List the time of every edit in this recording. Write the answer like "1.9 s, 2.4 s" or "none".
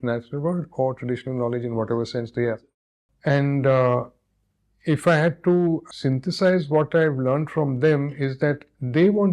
3.1 s, 5.9 s